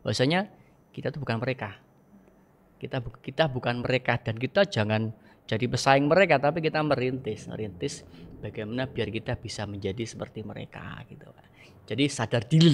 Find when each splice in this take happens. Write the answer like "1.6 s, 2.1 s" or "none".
none